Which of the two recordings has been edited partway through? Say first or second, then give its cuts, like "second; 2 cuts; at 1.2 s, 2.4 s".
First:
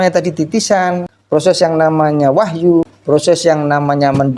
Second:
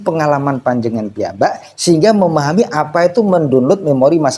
first; 2 cuts; at 1.1 s, 2.9 s